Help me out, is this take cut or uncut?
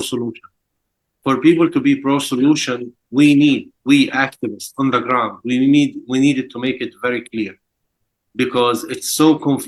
uncut